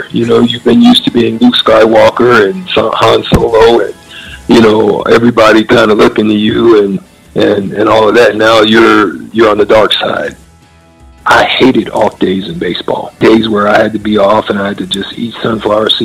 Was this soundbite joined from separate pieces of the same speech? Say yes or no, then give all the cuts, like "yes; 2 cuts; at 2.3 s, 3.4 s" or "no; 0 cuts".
yes; 2 cuts; at 10.5 s, 13.1 s